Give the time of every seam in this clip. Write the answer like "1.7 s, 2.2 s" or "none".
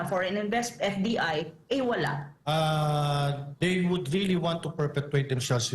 2.3 s

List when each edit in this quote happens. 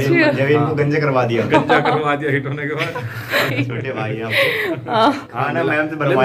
3.5 s, 5.3 s

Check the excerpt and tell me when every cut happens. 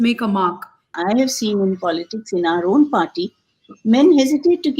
0.9 s

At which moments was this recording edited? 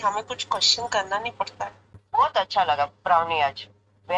1.9 s

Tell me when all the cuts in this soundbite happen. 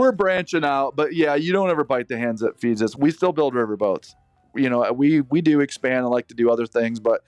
2.9 s, 4.4 s

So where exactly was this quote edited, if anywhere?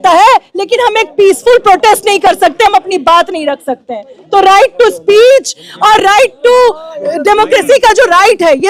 none

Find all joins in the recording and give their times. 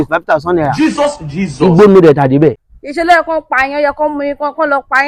none

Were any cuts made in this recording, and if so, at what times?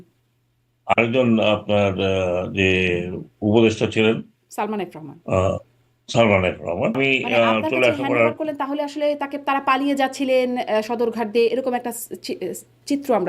7.0 s

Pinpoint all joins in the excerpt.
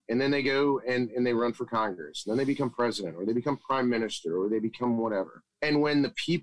5.4 s

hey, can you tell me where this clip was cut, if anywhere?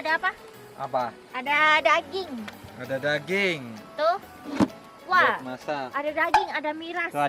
none

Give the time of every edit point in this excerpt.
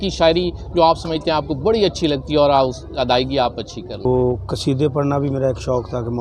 4.0 s

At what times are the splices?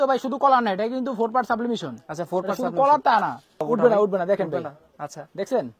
3.6 s

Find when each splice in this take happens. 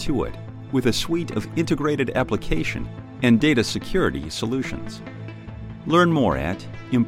none

